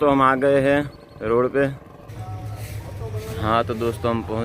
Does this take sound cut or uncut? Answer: cut